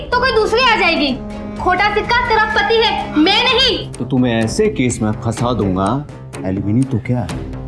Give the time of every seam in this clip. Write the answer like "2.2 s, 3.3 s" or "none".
3.9 s